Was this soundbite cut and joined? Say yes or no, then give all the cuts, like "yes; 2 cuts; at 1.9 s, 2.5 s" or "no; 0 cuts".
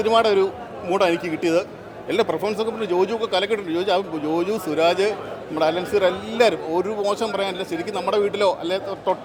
no; 0 cuts